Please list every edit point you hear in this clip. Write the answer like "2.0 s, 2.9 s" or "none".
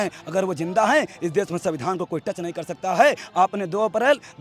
none

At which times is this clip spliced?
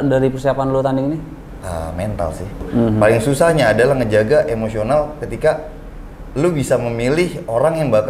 1.5 s, 2.7 s

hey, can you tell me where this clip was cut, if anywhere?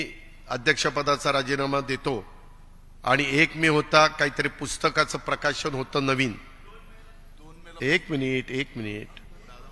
none

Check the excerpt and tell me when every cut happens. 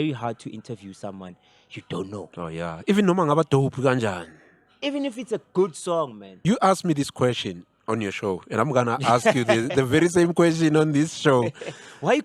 6.4 s

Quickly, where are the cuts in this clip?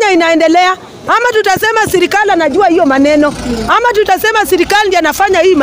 1.0 s

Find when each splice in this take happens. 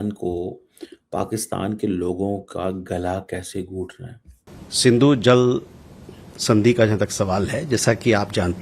4.5 s

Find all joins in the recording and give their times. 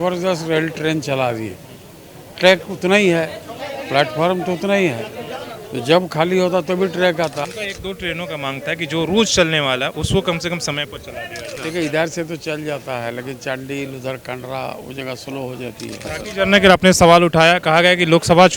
7.4 s, 11.6 s, 16.1 s

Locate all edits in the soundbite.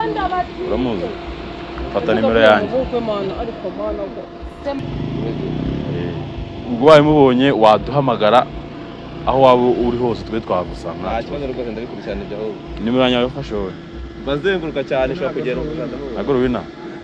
4.8 s

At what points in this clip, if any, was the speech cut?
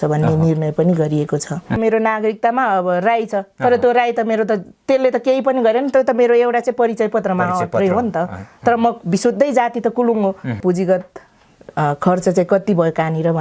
1.8 s, 10.6 s

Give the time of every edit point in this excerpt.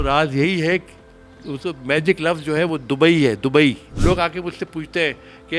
3.9 s

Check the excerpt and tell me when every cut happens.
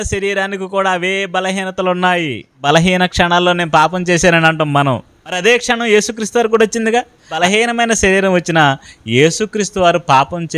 2.6 s, 5.4 s, 7.4 s

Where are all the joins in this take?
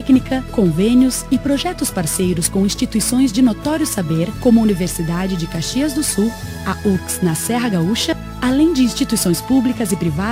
none

